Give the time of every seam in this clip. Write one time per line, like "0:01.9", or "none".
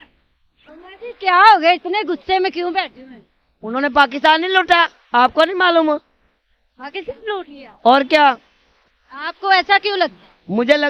none